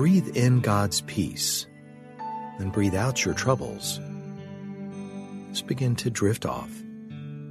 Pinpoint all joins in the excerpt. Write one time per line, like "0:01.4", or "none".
0:04.0
0:05.6
0:06.6